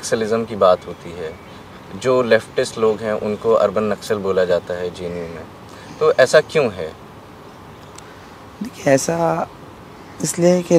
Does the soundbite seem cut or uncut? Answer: uncut